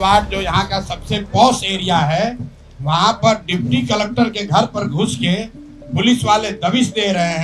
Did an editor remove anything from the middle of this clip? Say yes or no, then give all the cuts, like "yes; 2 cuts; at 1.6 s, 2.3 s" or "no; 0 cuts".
no; 0 cuts